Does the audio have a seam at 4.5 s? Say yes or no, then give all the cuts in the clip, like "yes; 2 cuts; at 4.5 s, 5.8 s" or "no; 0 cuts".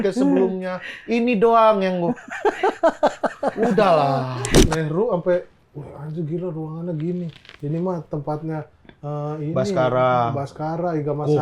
yes; 1 cut; at 4.5 s